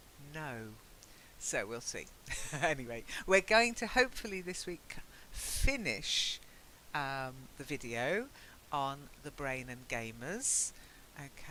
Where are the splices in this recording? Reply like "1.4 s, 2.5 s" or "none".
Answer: none